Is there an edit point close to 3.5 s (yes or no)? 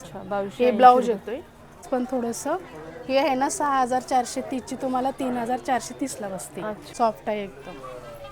no